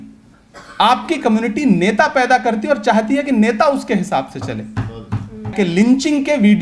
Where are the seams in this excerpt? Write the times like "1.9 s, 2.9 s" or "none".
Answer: 5.5 s